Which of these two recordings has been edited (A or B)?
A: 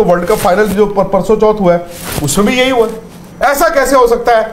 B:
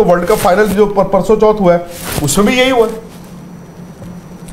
A